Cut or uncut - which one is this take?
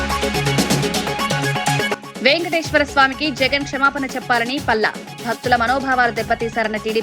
cut